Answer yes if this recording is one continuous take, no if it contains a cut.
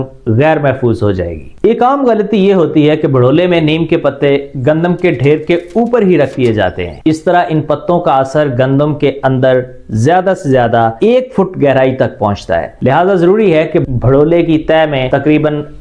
yes